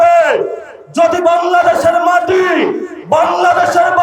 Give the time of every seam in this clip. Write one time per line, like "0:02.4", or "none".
none